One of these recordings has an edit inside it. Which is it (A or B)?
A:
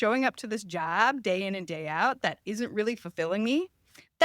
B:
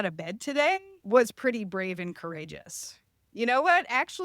B